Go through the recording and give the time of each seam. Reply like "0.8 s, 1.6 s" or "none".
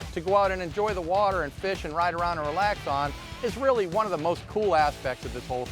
none